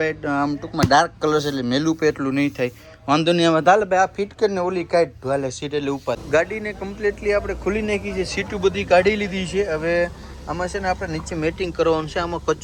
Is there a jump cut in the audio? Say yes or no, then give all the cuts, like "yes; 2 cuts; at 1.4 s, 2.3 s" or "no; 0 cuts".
no; 0 cuts